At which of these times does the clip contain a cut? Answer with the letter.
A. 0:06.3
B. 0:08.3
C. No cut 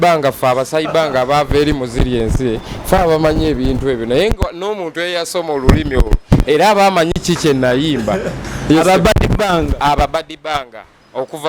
C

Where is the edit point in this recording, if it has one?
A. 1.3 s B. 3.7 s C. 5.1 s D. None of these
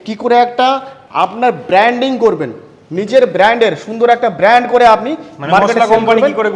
D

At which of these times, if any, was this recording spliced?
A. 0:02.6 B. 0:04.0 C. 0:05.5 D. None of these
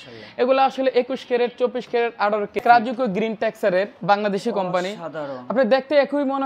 A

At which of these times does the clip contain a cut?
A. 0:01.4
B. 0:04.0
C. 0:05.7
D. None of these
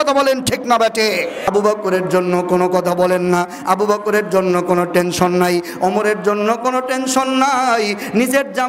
A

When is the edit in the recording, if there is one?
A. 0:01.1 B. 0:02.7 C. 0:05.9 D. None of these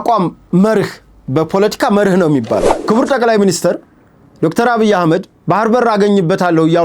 B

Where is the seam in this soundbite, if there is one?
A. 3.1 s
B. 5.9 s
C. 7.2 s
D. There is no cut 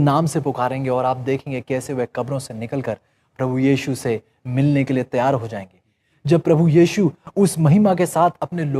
B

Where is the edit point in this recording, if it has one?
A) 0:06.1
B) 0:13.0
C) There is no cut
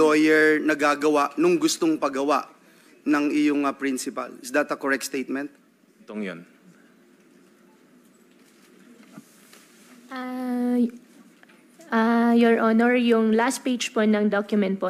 A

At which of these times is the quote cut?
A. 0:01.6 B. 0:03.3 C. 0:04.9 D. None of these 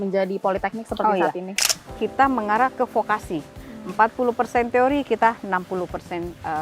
A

